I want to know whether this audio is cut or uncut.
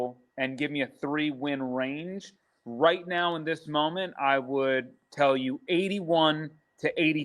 cut